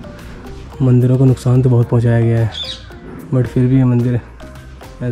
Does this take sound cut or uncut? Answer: uncut